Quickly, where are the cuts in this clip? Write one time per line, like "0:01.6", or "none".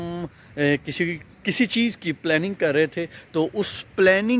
0:01.2